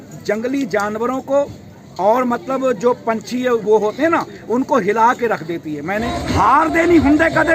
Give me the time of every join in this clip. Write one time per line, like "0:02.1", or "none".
0:06.1

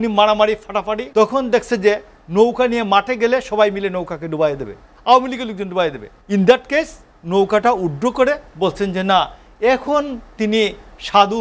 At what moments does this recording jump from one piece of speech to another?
0:01.0
0:06.1

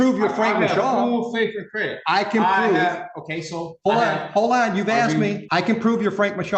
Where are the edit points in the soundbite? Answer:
0:05.4

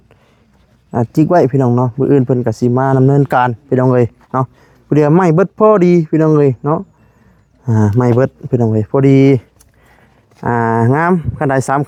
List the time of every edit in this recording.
none

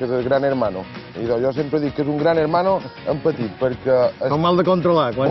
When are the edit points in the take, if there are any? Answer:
none

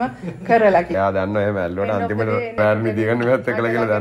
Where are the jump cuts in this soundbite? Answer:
0:00.9
0:02.6

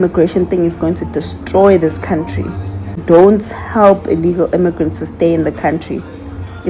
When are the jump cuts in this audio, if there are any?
0:03.0

